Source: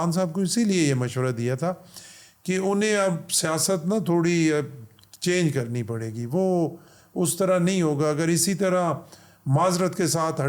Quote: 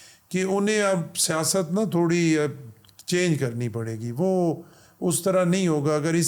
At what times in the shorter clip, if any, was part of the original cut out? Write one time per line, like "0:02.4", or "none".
none